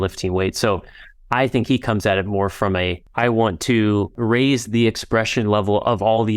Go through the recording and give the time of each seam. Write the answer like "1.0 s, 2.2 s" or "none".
3.0 s, 4.2 s